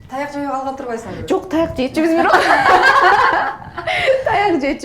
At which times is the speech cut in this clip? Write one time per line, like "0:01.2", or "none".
none